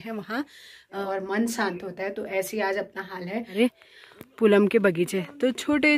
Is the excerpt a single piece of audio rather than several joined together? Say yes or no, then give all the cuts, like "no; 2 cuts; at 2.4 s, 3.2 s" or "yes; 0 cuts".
no; 2 cuts; at 1.0 s, 3.6 s